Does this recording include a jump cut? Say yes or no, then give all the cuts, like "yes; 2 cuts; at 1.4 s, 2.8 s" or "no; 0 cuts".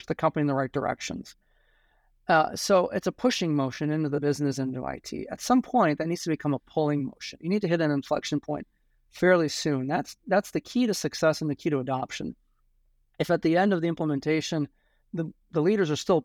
no; 0 cuts